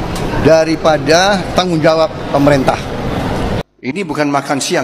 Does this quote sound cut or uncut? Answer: cut